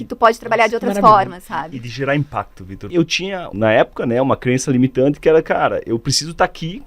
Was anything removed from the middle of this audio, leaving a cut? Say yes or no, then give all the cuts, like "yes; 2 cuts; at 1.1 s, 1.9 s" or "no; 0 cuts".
yes; 1 cut; at 3.1 s